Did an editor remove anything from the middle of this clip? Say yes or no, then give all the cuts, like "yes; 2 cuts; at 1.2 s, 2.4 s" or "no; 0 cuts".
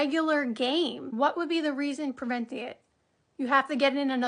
yes; 1 cut; at 1.0 s